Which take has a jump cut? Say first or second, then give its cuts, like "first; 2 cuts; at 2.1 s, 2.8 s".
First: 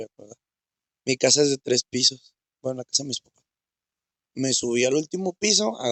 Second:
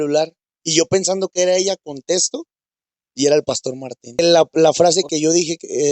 second; 1 cut; at 4.2 s